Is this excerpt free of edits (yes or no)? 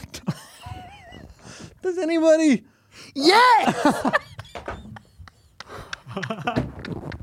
yes